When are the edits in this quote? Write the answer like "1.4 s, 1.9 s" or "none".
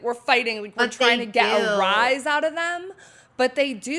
none